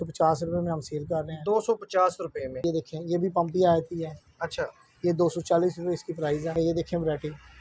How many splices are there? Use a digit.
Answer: 2